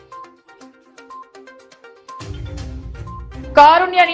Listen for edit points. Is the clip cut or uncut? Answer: cut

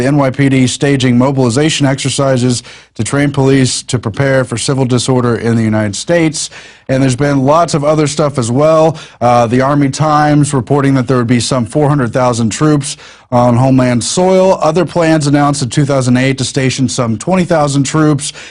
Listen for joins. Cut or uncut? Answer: cut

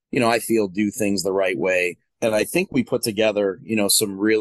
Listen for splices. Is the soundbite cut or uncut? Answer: cut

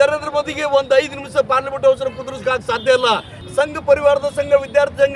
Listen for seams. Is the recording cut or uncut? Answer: cut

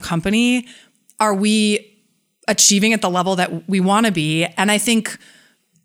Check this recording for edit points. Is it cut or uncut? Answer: uncut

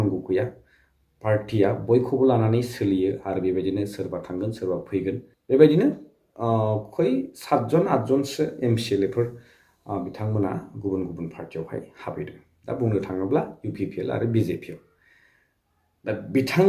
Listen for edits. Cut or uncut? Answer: cut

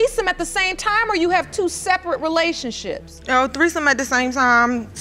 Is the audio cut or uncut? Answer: uncut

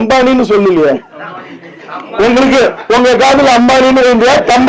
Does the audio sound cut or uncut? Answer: uncut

